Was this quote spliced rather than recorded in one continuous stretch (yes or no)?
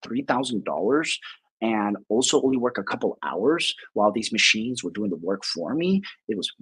no